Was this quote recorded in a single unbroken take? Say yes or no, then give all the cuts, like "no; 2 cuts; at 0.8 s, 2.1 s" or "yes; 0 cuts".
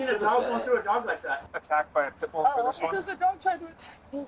no; 2 cuts; at 1.4 s, 2.4 s